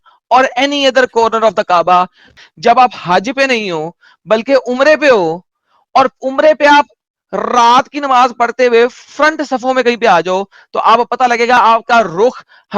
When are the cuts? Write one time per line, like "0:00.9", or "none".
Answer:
0:02.3